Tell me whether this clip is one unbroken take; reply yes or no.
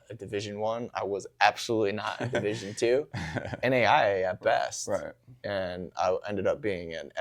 no